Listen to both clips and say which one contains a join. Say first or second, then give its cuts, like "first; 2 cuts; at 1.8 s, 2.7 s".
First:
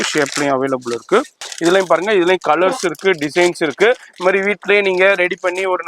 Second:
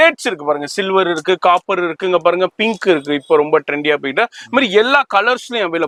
first; 1 cut; at 1.4 s